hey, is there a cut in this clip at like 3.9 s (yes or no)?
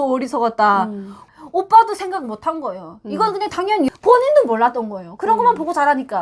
yes